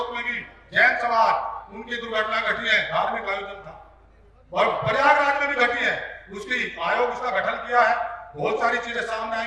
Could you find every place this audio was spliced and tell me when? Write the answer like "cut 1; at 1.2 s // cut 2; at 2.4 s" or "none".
none